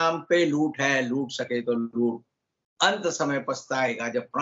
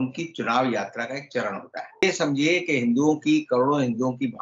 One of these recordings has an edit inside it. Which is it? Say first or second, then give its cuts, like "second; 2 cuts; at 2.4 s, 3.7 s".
second; 1 cut; at 2.0 s